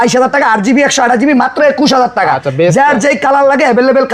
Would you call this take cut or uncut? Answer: uncut